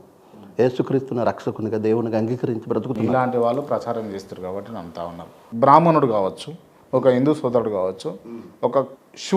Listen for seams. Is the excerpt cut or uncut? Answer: cut